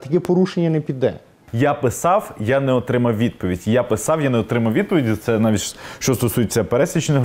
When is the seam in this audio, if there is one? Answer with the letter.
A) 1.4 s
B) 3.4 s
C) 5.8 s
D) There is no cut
A